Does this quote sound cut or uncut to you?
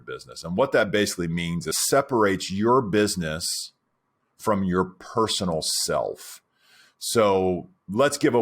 cut